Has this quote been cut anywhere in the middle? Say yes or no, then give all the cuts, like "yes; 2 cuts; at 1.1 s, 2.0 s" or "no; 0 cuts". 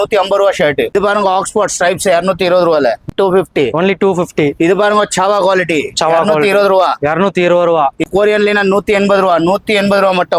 yes; 3 cuts; at 0.9 s, 3.1 s, 8.0 s